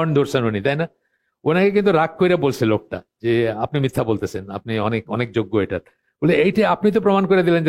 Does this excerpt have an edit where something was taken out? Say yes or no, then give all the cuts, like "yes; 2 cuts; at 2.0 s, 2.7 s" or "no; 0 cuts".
no; 0 cuts